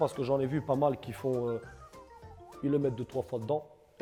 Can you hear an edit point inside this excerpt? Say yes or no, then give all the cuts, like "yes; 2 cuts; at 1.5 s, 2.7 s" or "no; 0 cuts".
no; 0 cuts